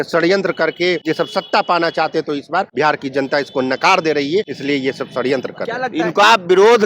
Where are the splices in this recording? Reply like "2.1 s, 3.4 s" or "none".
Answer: 1.0 s, 2.7 s, 4.5 s, 5.8 s

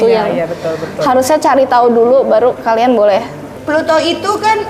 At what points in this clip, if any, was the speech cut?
3.4 s

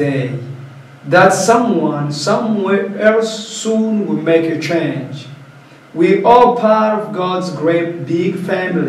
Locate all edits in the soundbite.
none

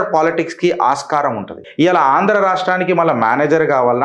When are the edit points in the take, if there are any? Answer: 1.6 s

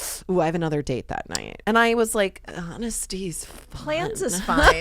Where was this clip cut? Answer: 1.4 s

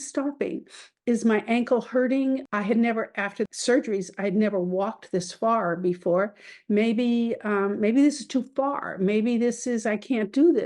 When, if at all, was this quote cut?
2.5 s, 3.5 s

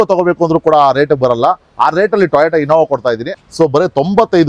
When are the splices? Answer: 3.3 s

